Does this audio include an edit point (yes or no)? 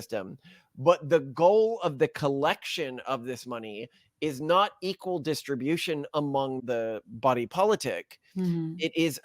yes